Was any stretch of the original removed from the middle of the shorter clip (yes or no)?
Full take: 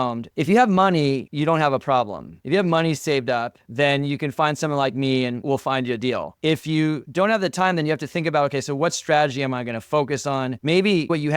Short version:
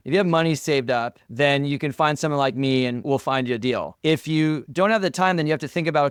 no